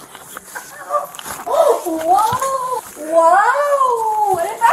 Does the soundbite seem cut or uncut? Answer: cut